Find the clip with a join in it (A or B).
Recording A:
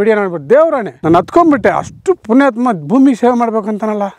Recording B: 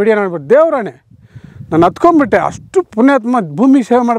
A